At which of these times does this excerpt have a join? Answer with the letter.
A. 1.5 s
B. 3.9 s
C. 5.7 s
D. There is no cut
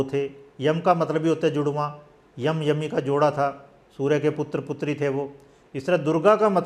D